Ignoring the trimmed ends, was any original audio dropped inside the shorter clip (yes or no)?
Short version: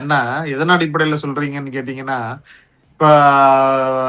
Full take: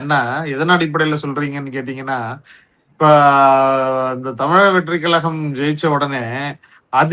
no